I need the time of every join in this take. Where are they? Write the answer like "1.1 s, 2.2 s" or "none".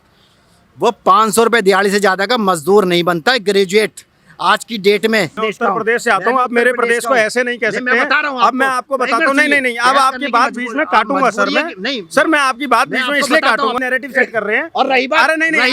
5.4 s, 13.8 s